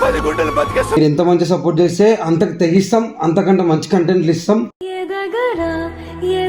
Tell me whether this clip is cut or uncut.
cut